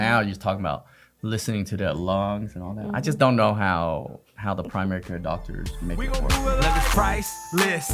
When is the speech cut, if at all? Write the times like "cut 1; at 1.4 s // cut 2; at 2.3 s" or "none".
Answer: cut 1; at 6.0 s

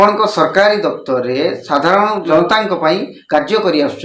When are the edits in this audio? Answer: cut 1; at 2.3 s

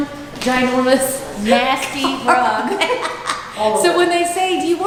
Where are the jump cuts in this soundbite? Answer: none

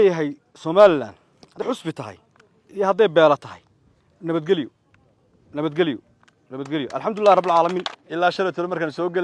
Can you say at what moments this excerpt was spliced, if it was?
cut 1; at 1.6 s // cut 2; at 7.9 s

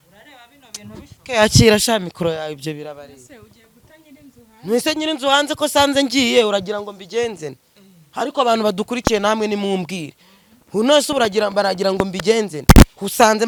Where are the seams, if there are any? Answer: none

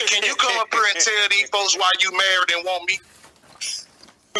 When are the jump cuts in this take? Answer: none

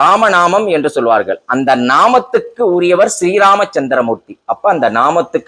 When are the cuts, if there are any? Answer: none

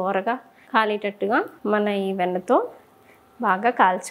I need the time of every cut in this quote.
none

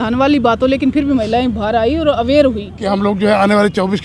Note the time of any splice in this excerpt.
cut 1; at 2.7 s

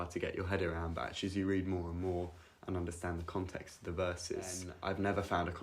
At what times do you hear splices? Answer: cut 1; at 4.7 s

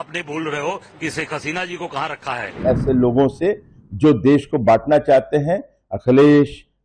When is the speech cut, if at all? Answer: cut 1; at 2.6 s

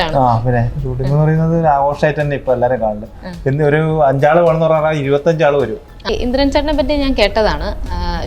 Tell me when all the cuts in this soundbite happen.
cut 1; at 5.9 s

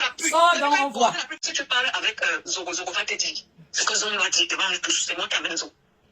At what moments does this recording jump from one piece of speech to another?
cut 1; at 1.4 s

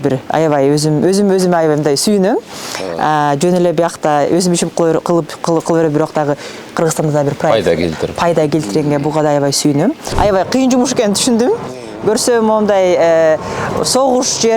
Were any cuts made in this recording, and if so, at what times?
cut 1; at 10.1 s

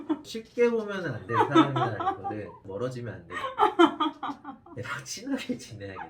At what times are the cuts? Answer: none

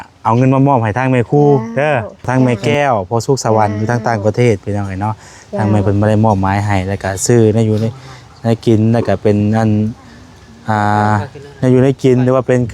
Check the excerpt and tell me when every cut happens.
cut 1; at 2.3 s

